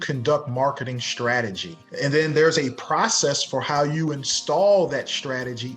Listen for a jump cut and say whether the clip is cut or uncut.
cut